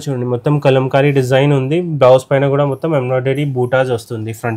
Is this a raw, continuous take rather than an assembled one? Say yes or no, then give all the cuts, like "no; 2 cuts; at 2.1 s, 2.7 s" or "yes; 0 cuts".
yes; 0 cuts